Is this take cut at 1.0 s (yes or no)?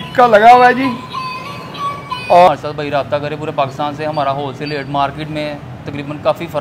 no